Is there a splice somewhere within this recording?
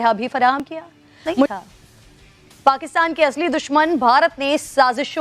yes; 1 cut; at 1.5 s

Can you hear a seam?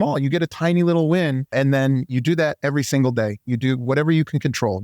yes; 1 cut; at 1.5 s

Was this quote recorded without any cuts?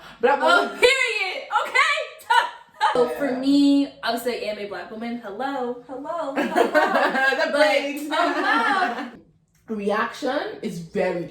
no; 2 cuts; at 3.0 s, 9.1 s

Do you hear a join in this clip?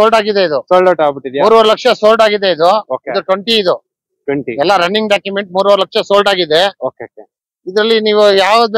no; 0 cuts

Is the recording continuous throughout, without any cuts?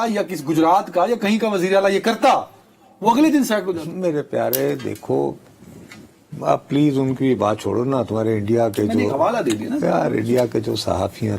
yes; 0 cuts

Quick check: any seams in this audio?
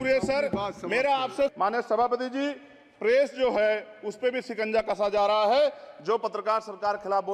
yes; 1 cut; at 1.5 s

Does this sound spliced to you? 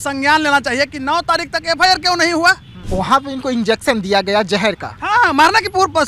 yes; 1 cut; at 2.7 s

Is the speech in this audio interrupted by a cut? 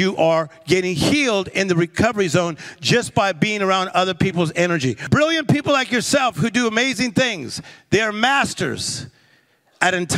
yes; 1 cut; at 5.1 s

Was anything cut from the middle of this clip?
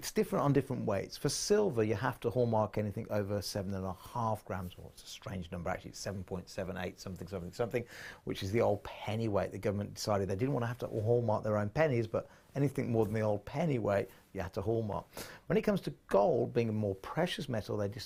no; 0 cuts

